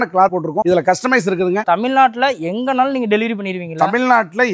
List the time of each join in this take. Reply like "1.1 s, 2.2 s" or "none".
1.6 s